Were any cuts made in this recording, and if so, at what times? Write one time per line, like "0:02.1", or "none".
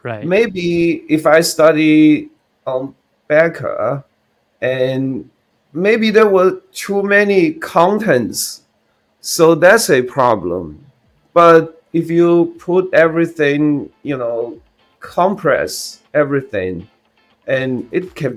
none